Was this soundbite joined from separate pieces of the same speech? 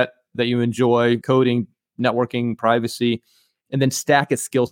yes; 1 cut; at 1.2 s

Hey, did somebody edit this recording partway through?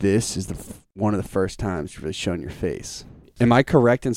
yes; 1 cut; at 3.3 s

